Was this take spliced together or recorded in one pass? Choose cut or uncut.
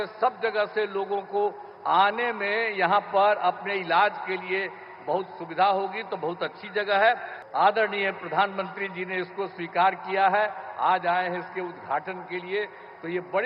cut